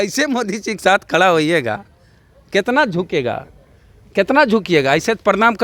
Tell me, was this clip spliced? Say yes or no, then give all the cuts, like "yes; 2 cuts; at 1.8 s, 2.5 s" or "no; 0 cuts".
no; 0 cuts